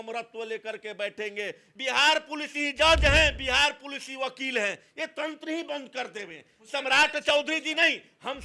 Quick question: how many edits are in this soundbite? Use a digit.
1